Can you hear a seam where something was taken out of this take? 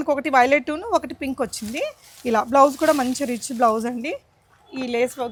no; 0 cuts

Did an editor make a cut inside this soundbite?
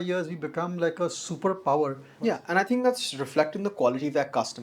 yes; 1 cut; at 2.1 s

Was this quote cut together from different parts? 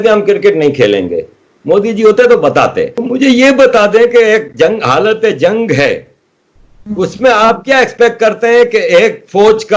yes; 1 cut; at 3.0 s

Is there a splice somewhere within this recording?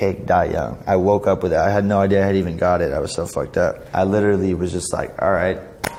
no; 0 cuts

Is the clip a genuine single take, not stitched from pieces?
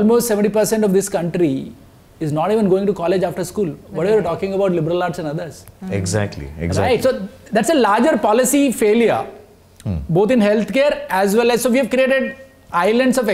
yes; 0 cuts

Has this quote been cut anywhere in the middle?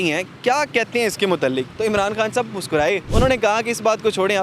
yes; 1 cut; at 3.1 s

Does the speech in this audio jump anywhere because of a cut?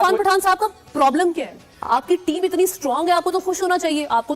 no; 0 cuts

